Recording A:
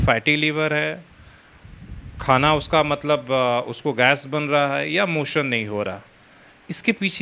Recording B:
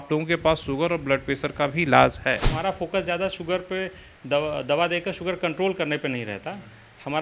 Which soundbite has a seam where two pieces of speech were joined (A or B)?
B